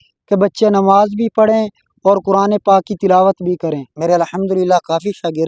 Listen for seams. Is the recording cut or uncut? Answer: cut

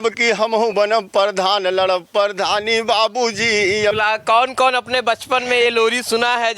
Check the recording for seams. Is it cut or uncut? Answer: cut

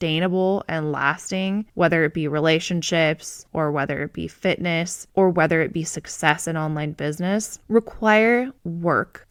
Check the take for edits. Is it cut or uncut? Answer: uncut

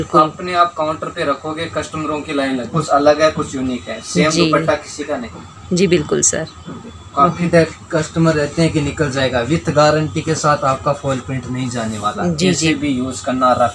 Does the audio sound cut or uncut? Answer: cut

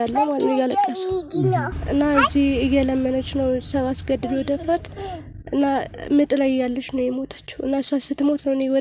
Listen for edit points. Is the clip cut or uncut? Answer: cut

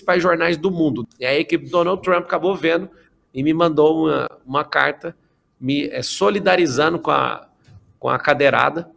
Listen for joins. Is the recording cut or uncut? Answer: cut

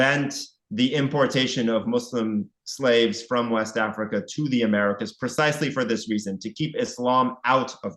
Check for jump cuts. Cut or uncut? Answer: uncut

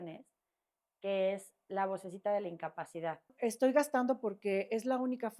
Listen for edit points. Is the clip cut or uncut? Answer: cut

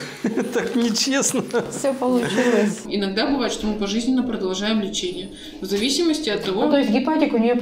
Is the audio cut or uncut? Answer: cut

